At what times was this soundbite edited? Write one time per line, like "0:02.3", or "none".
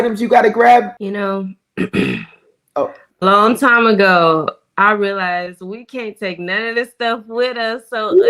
0:00.9